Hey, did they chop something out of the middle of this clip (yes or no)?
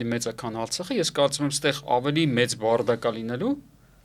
no